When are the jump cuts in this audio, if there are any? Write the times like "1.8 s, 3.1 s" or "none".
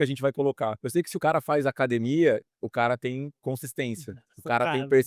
1.1 s